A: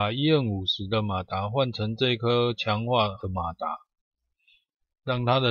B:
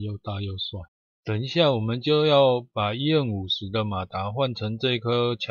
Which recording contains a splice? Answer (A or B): B